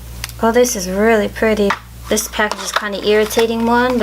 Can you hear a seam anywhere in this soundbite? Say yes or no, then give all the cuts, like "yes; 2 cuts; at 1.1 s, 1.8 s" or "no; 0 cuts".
yes; 1 cut; at 1.8 s